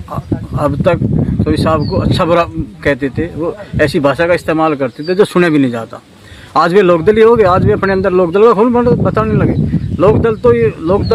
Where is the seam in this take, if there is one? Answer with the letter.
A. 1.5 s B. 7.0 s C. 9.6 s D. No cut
D